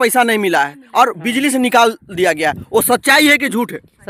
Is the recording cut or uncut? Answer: uncut